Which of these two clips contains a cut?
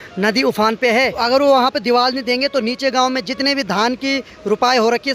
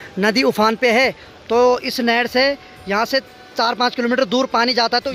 first; 1 cut; at 1.1 s

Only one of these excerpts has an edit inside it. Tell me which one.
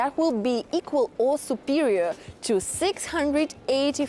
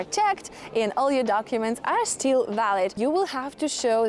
second; 1 cut; at 3.0 s

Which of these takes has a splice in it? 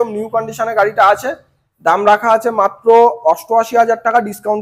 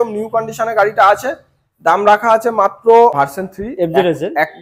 second; 1 cut; at 3.1 s

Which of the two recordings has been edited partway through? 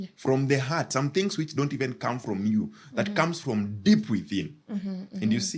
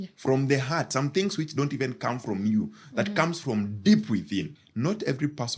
second; 1 cut; at 4.6 s

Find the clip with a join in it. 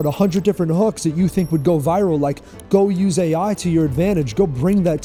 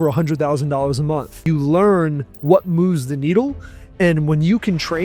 second; 1 cut; at 1.4 s

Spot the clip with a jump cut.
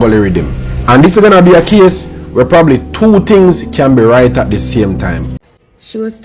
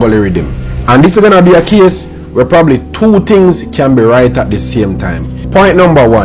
first; 1 cut; at 5.4 s

